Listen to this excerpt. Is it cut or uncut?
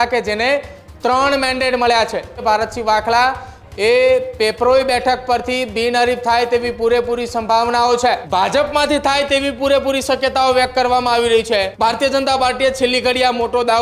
cut